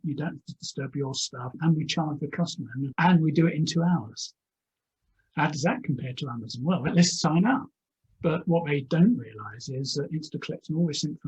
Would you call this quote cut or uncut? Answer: cut